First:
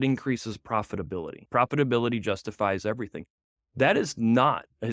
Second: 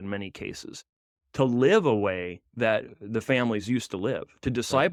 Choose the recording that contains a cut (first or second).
first